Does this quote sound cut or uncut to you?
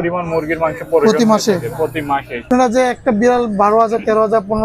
cut